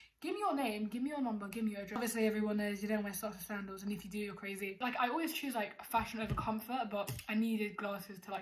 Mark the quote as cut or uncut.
cut